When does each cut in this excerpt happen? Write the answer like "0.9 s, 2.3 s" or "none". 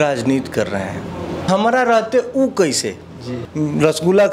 1.5 s, 3.4 s